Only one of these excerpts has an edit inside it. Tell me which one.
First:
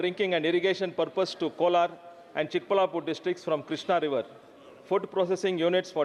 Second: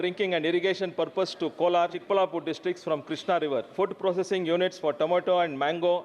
second; 2 cuts; at 2.0 s, 3.7 s

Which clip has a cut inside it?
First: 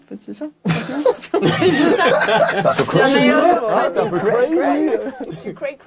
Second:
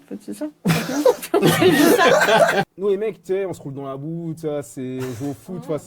second; 1 cut; at 2.6 s

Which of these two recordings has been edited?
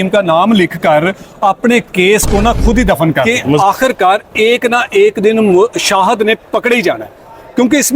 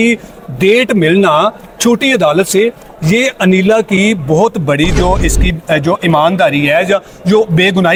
first; 1 cut; at 3.6 s

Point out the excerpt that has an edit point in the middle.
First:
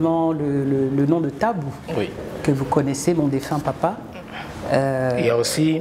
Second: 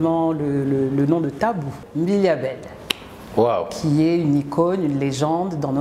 second; 1 cut; at 1.8 s

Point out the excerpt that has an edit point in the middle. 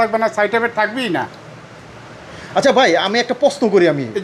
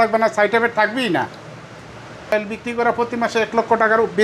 second; 1 cut; at 2.3 s

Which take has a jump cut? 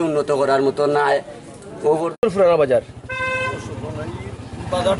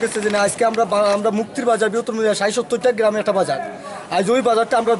first; 1 cut; at 2.2 s

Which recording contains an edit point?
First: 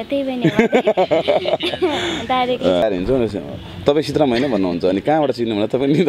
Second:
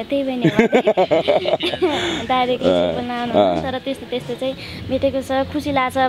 first; 1 cut; at 2.8 s

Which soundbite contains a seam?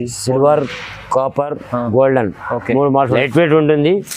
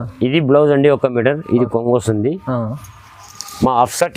first; 1 cut; at 3.1 s

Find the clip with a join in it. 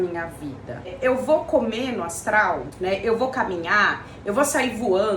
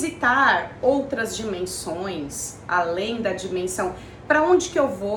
first; 2 cuts; at 0.9 s, 2.7 s

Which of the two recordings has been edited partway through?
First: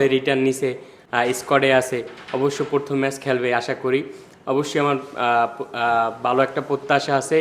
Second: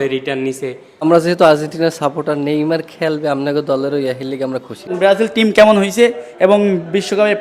second; 2 cuts; at 1.0 s, 4.9 s

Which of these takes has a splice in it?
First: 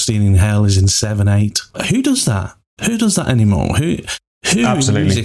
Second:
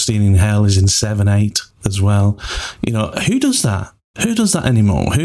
first; 1 cut; at 1.8 s

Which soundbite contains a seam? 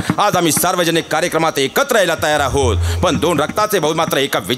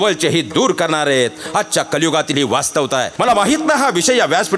second; 1 cut; at 3.1 s

